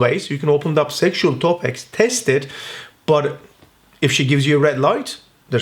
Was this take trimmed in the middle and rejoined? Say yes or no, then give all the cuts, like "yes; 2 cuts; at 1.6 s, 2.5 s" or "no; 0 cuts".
no; 0 cuts